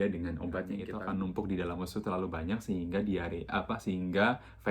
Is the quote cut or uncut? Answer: cut